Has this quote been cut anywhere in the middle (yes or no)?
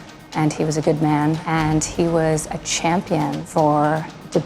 yes